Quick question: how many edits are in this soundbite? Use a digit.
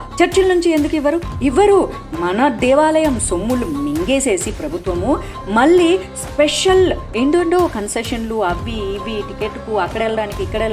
0